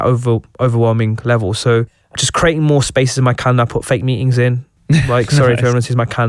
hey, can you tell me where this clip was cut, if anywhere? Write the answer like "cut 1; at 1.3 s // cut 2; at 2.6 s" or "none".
cut 1; at 2.2 s